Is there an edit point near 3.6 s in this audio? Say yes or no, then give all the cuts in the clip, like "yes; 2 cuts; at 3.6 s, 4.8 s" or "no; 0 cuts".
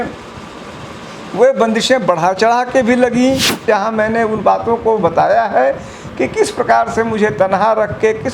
yes; 1 cut; at 3.6 s